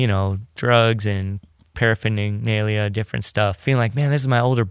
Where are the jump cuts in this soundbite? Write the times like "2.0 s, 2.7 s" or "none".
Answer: 3.6 s